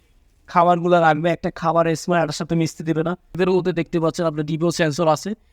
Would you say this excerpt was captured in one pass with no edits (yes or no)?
no